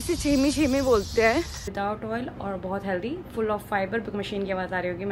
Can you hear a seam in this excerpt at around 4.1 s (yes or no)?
yes